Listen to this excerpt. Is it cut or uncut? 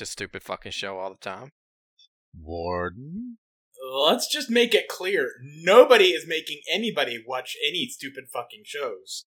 cut